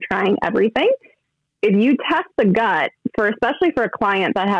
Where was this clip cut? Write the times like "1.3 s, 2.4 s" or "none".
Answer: 1.2 s